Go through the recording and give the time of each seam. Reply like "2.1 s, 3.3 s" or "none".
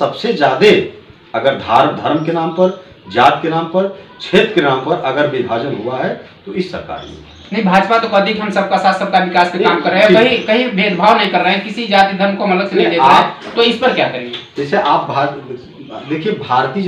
none